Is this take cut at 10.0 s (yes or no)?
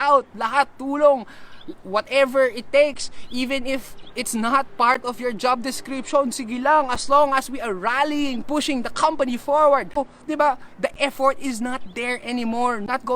yes